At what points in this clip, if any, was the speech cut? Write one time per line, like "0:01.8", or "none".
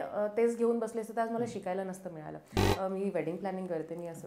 0:02.6